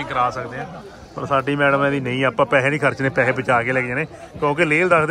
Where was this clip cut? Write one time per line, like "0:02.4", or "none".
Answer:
none